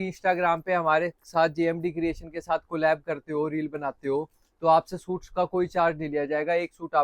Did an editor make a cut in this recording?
no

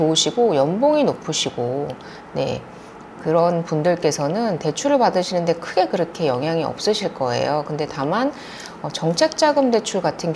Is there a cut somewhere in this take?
no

